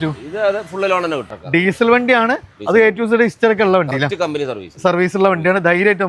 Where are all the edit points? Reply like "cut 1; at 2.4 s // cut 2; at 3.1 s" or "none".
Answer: cut 1; at 1.3 s